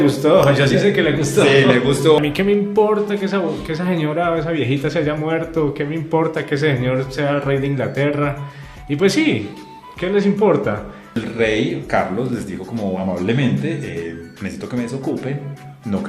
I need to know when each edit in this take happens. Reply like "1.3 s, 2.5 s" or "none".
2.2 s, 11.1 s